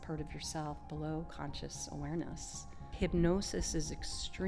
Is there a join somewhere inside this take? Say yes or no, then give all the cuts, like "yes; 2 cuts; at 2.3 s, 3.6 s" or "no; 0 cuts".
yes; 1 cut; at 2.9 s